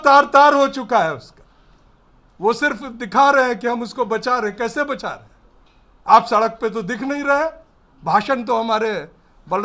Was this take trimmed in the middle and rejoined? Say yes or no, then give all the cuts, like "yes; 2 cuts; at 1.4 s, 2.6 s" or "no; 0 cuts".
no; 0 cuts